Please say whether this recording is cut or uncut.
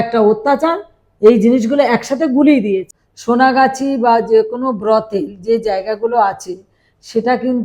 cut